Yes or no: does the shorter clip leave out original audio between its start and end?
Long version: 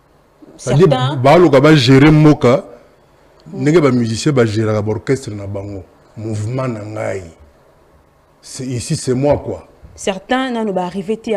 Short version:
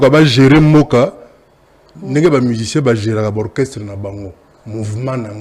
no